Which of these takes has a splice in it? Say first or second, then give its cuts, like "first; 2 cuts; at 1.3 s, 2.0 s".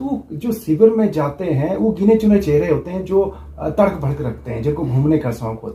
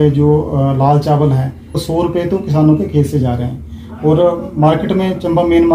second; 1 cut; at 1.8 s